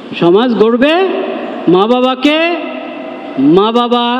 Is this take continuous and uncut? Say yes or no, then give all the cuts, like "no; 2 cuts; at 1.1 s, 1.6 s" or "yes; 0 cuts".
yes; 0 cuts